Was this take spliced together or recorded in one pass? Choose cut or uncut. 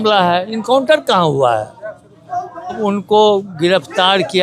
cut